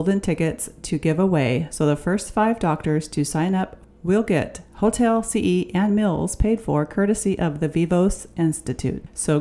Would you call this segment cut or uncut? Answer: cut